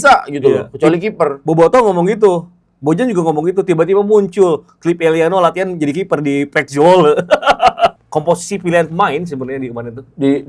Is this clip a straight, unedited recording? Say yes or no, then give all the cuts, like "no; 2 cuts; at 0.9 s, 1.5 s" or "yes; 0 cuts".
no; 1 cut; at 8.0 s